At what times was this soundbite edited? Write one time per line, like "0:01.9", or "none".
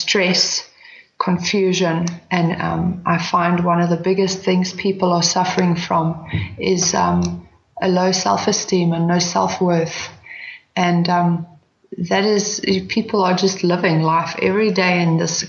none